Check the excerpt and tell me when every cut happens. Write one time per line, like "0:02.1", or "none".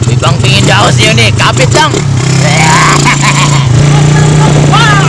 0:03.8